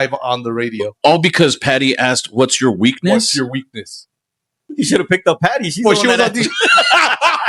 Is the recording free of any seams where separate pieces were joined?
no; 1 cut; at 4.6 s

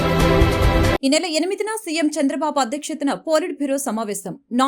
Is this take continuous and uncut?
yes; 0 cuts

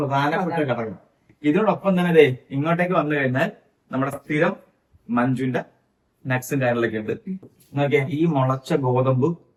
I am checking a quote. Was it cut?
no; 0 cuts

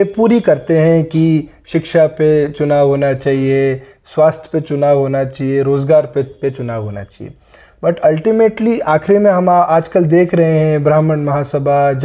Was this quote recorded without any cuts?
yes; 0 cuts

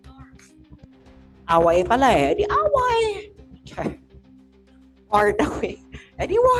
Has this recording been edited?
no; 0 cuts

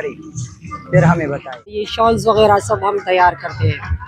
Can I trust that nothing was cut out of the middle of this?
no; 1 cut; at 1.9 s

